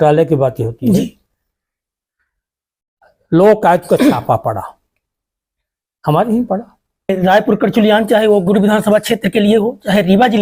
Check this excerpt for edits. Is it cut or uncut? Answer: cut